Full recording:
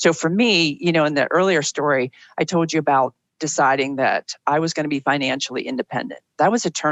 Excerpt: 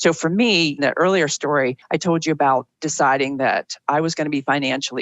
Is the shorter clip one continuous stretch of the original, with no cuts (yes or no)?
no